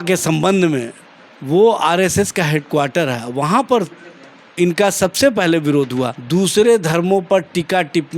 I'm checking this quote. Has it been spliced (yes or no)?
yes